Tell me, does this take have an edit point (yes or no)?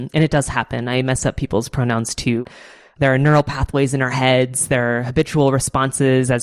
no